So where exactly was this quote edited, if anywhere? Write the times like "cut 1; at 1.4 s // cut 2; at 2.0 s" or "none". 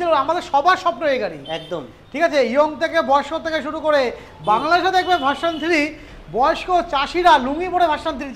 none